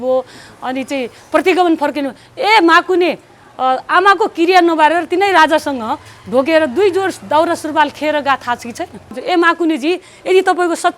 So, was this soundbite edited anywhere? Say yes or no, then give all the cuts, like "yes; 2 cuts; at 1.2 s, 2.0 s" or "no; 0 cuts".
yes; 1 cut; at 9.2 s